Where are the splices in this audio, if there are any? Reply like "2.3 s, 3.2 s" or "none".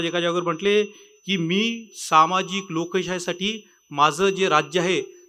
none